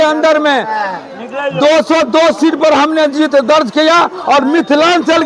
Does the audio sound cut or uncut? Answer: uncut